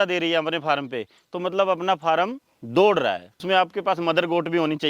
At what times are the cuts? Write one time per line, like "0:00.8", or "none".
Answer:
0:03.4